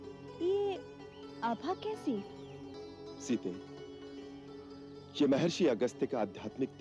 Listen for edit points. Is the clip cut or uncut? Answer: cut